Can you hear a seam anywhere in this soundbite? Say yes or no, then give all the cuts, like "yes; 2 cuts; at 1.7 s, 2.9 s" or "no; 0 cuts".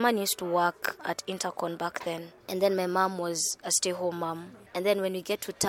yes; 2 cuts; at 1.0 s, 4.5 s